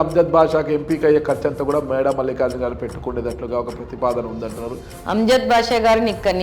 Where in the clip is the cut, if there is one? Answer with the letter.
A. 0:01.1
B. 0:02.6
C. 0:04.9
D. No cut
C